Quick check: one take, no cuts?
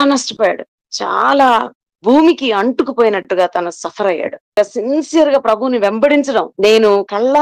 no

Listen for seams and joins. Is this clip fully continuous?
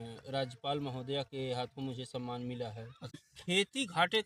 no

